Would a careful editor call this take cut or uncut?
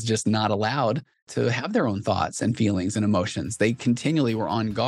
cut